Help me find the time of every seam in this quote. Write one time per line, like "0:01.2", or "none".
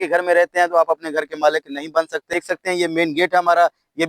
0:02.3